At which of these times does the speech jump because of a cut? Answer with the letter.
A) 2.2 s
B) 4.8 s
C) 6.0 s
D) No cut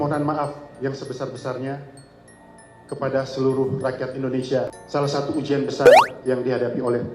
B